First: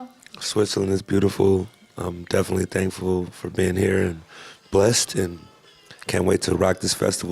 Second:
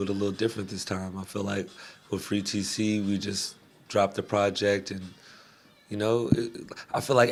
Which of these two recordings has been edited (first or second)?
first